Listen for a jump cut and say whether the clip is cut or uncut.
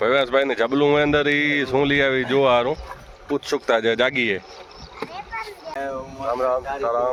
uncut